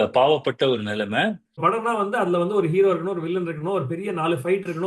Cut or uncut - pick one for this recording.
cut